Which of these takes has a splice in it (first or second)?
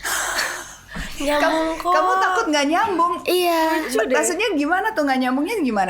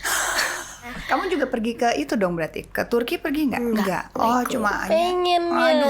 second